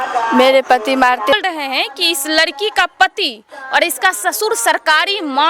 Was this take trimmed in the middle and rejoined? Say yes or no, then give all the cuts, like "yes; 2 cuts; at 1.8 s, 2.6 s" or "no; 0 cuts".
yes; 1 cut; at 1.3 s